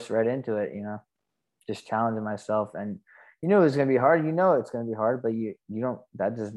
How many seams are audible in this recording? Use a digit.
0